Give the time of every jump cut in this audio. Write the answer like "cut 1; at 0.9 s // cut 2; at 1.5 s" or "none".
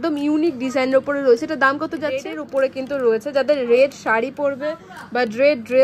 cut 1; at 2.4 s